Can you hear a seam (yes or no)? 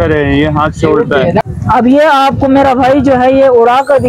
yes